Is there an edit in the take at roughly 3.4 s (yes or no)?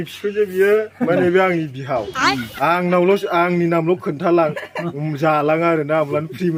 no